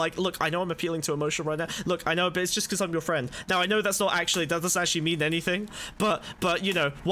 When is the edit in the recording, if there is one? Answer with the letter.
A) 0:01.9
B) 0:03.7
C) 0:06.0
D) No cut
D